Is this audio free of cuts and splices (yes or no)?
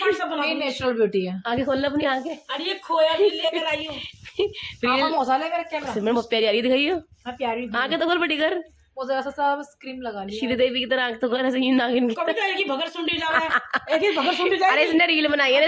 yes